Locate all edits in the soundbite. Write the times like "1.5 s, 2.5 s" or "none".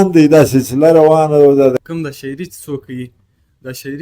1.7 s